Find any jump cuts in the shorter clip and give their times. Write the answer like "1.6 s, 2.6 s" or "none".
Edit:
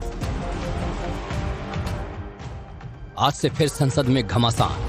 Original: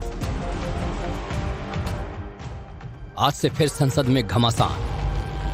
none